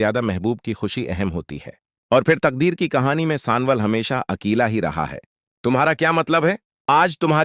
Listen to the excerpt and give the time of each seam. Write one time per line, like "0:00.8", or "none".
none

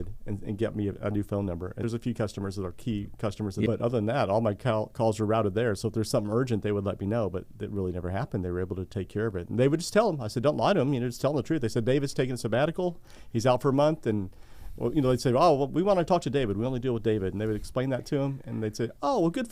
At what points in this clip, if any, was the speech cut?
0:01.8
0:03.7

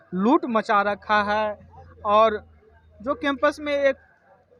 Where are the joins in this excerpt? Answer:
none

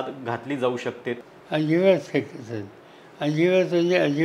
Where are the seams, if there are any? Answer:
0:01.2

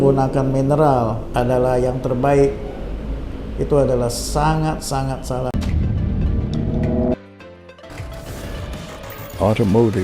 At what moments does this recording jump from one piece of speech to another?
0:05.5

